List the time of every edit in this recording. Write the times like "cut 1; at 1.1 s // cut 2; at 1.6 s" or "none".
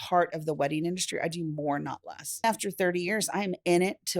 cut 1; at 2.4 s